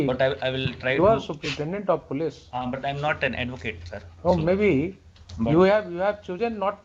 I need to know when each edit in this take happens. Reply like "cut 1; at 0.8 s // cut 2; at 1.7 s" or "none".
none